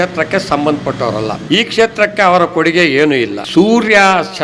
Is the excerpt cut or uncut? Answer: cut